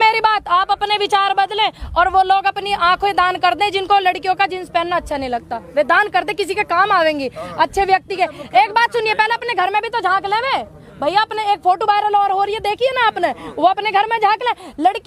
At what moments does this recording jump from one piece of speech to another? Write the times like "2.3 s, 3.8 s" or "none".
none